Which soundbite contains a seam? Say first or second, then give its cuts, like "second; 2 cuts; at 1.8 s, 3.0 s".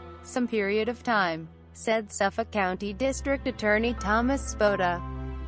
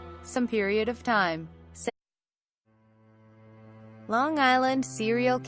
first; 1 cut; at 1.9 s